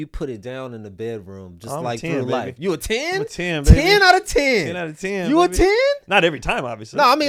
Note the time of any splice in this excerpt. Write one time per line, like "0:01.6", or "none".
none